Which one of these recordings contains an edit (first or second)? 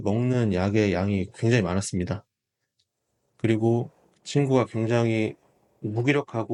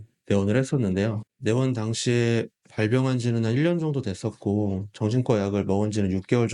second